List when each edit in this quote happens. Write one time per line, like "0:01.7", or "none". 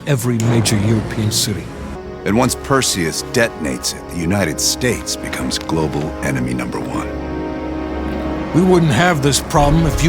0:02.0